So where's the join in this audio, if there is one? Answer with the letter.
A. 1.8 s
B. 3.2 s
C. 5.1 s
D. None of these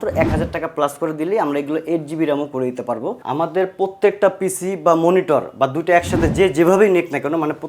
B